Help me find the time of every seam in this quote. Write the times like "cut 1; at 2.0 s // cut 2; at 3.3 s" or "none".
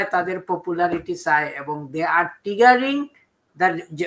none